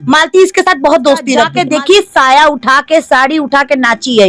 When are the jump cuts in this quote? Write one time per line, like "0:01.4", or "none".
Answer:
0:01.5

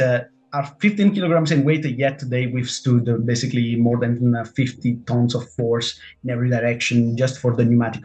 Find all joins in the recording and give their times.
none

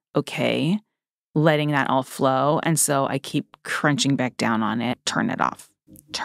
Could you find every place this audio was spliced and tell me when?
0:05.0

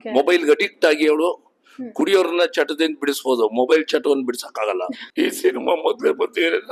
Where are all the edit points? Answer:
0:05.0

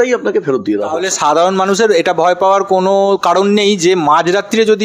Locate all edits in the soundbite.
0:01.0

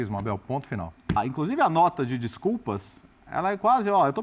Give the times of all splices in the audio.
0:01.2

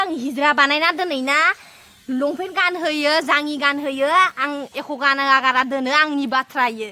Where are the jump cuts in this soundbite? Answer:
none

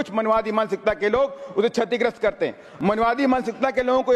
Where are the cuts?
0:02.6

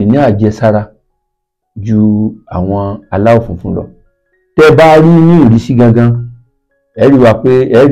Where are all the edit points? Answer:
none

